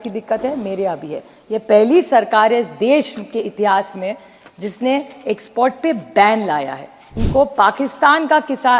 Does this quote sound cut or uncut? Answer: cut